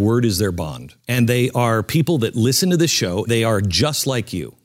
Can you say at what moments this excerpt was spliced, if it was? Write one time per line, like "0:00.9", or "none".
0:01.0
0:03.3